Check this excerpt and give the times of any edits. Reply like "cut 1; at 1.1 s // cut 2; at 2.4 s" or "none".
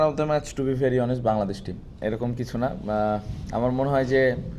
cut 1; at 1.9 s